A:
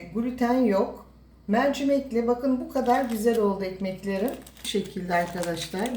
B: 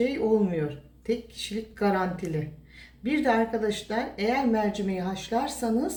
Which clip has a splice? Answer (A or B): A